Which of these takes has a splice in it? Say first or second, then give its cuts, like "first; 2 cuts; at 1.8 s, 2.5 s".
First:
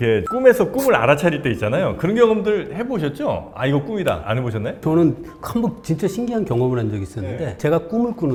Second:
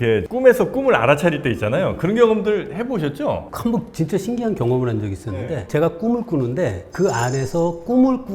second; 1 cut; at 3.5 s